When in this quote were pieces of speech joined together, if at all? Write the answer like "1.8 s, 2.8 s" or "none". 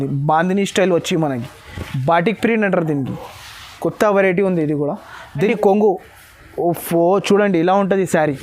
5.4 s